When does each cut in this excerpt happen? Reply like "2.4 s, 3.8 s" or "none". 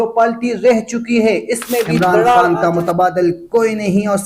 2.5 s